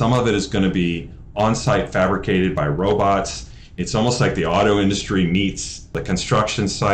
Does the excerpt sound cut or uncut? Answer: cut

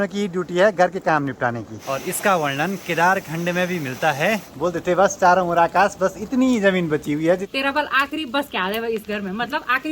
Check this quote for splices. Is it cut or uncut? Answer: cut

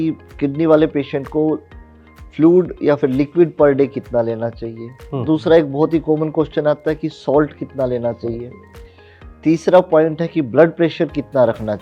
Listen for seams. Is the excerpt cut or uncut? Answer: uncut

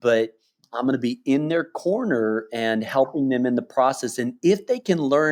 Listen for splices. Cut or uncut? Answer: uncut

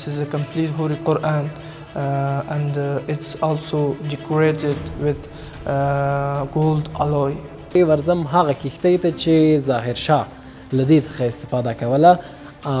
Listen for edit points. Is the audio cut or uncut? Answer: cut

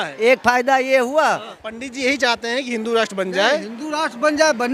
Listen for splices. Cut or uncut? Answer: cut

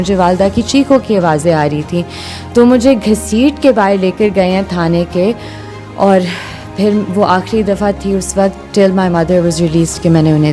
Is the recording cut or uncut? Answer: uncut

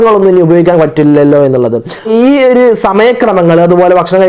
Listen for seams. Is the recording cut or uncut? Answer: cut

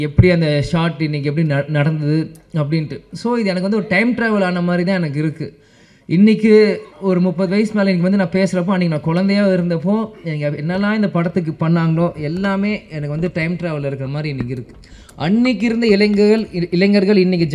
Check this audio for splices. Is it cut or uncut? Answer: uncut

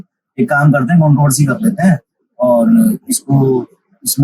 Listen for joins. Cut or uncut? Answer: uncut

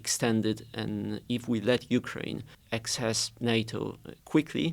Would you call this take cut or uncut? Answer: cut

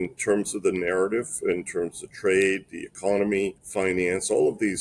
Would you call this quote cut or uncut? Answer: cut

